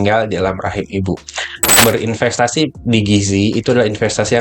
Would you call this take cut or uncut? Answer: cut